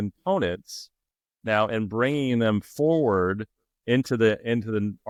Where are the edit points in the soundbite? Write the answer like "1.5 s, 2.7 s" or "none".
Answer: none